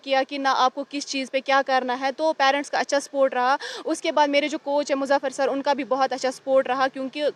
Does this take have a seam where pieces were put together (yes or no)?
no